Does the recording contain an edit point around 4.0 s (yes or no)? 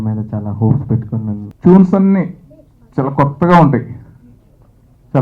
no